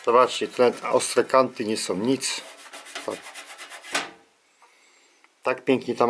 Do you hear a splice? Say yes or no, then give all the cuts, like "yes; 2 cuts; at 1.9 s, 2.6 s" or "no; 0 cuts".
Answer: no; 0 cuts